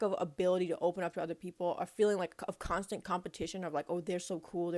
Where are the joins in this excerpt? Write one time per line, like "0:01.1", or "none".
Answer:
none